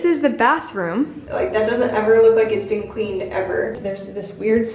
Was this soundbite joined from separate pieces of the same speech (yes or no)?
yes